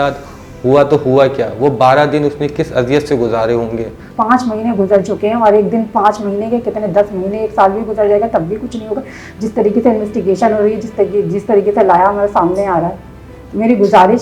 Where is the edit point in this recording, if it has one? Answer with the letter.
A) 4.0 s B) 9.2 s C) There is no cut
A